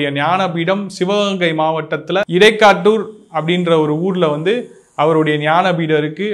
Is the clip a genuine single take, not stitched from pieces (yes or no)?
no